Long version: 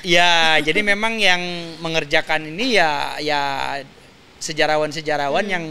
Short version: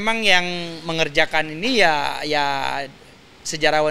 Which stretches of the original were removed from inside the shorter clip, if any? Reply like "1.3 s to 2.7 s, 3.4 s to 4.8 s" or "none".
none

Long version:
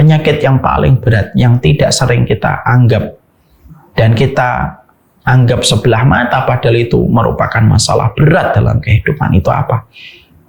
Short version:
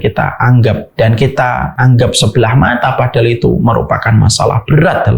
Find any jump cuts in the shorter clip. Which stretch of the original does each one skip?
3.1 s to 3.9 s, 4.7 s to 5.2 s

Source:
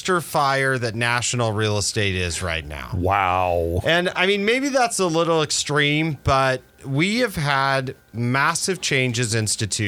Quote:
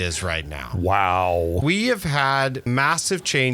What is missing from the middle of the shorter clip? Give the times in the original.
3.8 s to 6.9 s, 7.9 s to 8.2 s

